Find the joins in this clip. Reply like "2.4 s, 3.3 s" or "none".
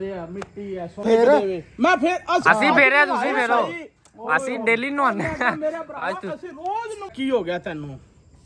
1.1 s, 7.1 s

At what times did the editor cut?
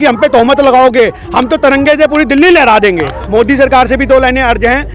3.2 s

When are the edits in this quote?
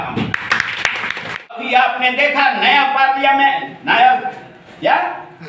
1.6 s

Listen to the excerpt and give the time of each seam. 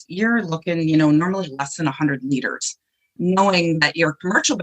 none

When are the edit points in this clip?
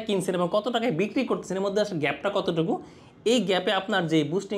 none

